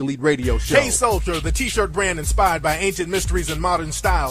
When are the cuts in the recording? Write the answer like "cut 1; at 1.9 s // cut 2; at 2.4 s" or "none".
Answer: cut 1; at 2.6 s